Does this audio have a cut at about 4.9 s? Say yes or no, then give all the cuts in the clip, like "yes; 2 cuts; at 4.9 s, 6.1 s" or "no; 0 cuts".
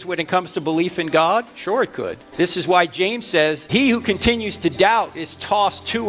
no; 2 cuts; at 2.2 s, 3.6 s